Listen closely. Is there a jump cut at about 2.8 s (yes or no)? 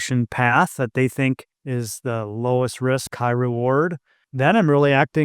no